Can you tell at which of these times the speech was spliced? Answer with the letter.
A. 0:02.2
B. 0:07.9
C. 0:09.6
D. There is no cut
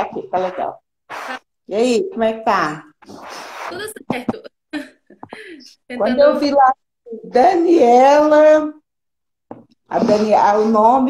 D